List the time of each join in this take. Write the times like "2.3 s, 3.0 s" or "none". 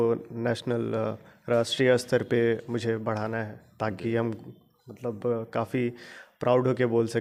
none